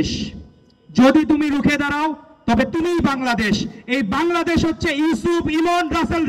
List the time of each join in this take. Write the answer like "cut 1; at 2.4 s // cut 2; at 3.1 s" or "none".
none

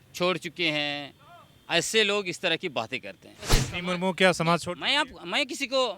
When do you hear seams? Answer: cut 1; at 3.6 s

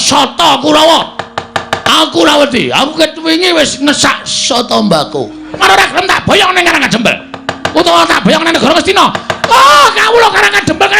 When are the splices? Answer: cut 1; at 5.6 s

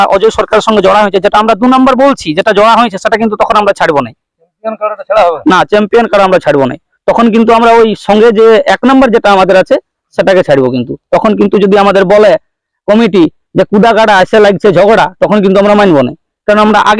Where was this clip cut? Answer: none

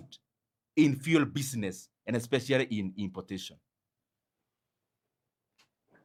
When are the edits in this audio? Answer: none

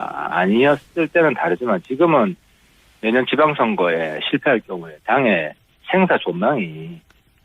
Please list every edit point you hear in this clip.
cut 1; at 5.2 s

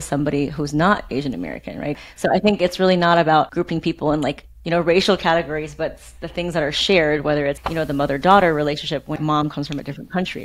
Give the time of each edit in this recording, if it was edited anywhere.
cut 1; at 2.0 s // cut 2; at 3.5 s // cut 3; at 7.6 s // cut 4; at 9.2 s

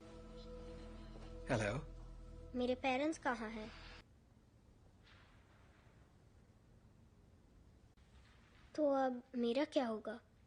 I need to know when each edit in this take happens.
cut 1; at 4.1 s

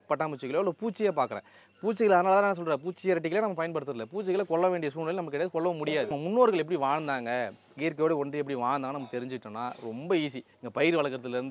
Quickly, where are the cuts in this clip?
cut 1; at 6.2 s

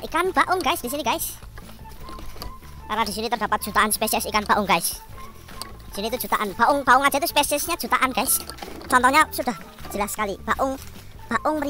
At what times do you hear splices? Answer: none

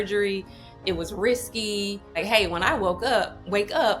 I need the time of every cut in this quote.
cut 1; at 2.2 s

